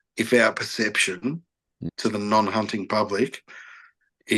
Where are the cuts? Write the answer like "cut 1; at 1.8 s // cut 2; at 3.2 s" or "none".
cut 1; at 1.7 s